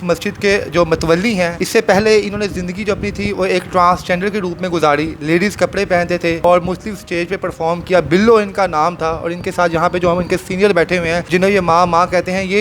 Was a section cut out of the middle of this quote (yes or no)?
yes